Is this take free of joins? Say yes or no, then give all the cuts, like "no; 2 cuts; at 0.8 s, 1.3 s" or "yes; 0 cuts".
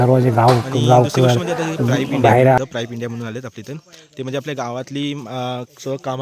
no; 1 cut; at 2.6 s